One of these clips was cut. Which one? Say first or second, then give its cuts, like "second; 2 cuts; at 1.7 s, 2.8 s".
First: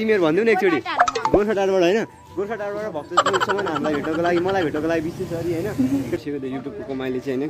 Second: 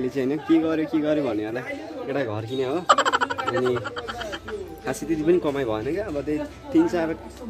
first; 1 cut; at 6.2 s